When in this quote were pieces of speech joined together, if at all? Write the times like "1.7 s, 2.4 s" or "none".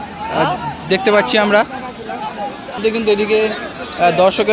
2.7 s